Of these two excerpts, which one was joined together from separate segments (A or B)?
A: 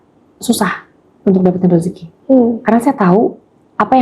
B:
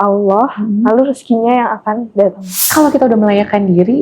B